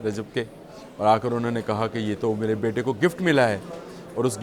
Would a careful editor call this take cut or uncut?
uncut